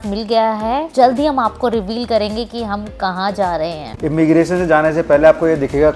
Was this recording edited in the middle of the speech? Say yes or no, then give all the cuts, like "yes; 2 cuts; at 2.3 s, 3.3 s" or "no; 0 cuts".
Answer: yes; 2 cuts; at 0.9 s, 3.9 s